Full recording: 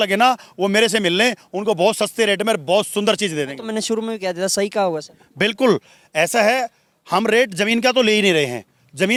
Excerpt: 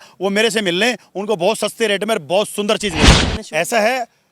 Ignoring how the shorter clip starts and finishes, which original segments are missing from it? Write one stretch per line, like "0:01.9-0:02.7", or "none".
0:03.7-0:05.9